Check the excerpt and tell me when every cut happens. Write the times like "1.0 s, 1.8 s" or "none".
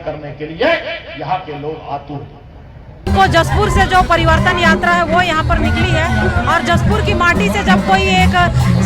3.1 s